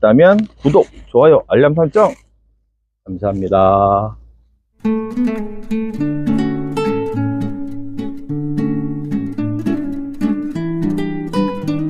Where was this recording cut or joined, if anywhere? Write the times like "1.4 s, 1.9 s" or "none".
none